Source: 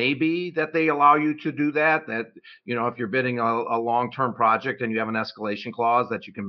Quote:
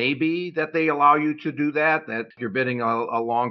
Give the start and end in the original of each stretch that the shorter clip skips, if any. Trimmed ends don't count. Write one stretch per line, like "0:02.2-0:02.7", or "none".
0:02.4-0:03.0